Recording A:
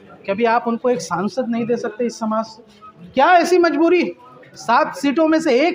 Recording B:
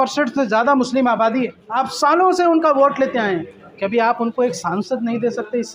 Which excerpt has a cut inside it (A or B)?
B